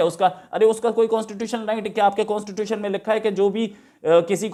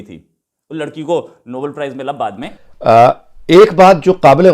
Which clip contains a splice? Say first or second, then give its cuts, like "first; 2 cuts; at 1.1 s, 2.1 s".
second; 1 cut; at 2.5 s